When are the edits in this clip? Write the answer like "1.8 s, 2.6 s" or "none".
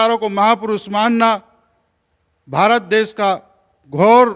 none